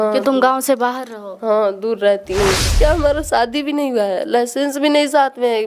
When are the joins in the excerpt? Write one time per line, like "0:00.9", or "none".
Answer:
0:02.7